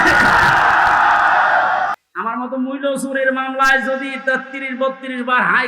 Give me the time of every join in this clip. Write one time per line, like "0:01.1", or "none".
0:01.9